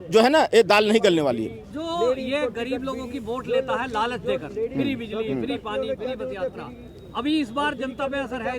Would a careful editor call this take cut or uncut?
uncut